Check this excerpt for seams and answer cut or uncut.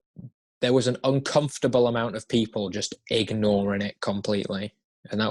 uncut